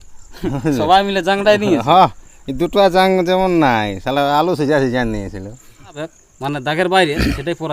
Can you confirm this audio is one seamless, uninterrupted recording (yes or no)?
no